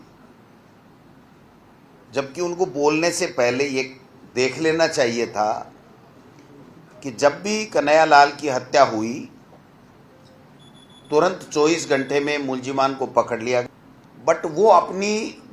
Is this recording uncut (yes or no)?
no